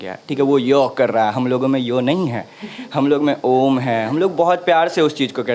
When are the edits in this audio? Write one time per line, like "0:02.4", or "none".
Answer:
none